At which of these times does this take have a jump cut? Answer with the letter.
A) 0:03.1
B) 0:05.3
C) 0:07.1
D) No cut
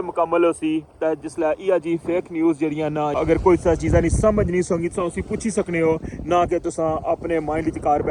A